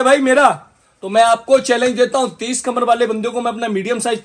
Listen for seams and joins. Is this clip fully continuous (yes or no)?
yes